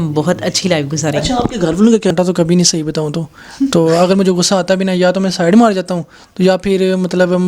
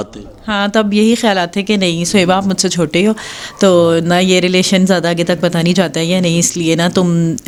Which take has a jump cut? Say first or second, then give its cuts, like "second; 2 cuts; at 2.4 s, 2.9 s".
first; 1 cut; at 2.1 s